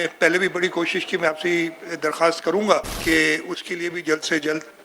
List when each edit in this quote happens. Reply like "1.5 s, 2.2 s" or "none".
2.9 s